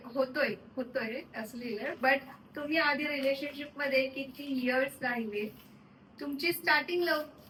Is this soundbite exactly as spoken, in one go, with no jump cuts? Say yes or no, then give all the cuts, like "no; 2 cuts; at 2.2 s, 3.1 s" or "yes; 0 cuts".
yes; 0 cuts